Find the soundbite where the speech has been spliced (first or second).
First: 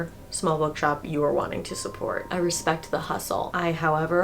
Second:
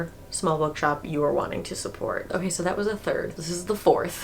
first